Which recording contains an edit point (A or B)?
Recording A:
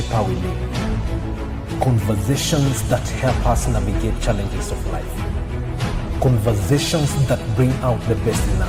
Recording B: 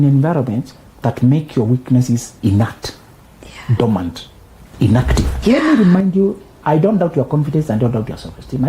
B